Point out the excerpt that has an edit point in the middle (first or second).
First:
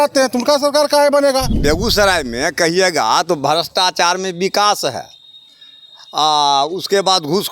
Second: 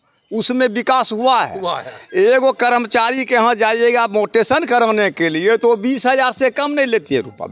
first